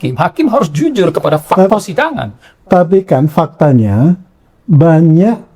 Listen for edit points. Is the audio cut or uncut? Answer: cut